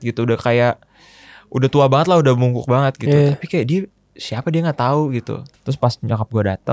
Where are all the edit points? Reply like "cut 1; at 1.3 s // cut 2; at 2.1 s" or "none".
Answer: cut 1; at 5.5 s